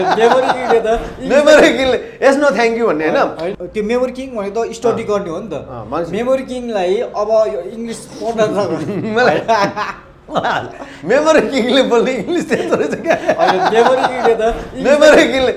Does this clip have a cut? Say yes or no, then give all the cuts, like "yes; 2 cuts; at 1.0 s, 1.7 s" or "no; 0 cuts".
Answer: yes; 1 cut; at 3.4 s